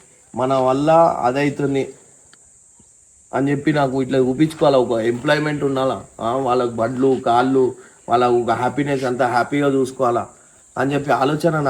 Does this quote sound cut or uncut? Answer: uncut